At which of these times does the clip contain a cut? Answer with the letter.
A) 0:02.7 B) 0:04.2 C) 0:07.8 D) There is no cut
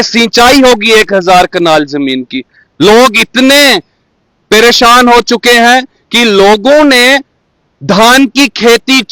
D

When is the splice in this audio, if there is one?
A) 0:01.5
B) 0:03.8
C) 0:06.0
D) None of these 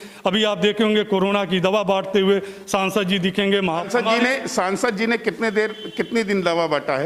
B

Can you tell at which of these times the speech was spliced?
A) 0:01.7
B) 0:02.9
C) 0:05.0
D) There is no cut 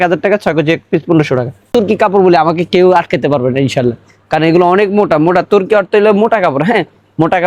A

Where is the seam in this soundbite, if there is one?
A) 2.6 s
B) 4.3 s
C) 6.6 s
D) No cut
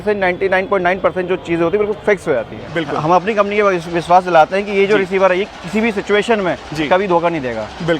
A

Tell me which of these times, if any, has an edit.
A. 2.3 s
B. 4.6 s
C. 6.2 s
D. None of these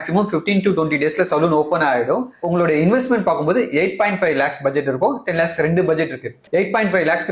A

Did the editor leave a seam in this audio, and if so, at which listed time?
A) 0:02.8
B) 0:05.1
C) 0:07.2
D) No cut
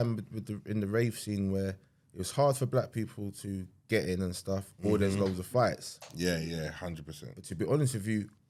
D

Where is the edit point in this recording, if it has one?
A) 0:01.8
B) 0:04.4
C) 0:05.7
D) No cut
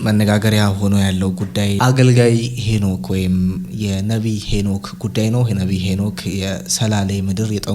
A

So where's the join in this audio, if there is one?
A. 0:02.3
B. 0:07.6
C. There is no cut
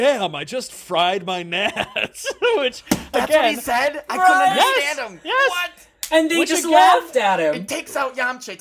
B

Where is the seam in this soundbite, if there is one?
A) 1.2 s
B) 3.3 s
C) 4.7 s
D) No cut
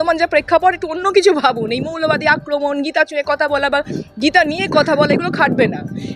D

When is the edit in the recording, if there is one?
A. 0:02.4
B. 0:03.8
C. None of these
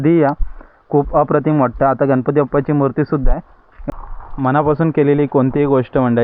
B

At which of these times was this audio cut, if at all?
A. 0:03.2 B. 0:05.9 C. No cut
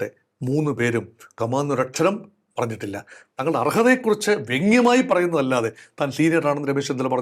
C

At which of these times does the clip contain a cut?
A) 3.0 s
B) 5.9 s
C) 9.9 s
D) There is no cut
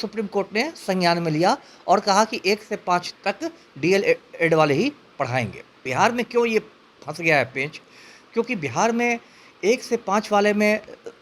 B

